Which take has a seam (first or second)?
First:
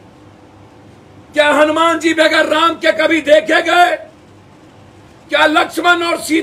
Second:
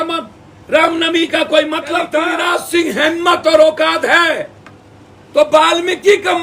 second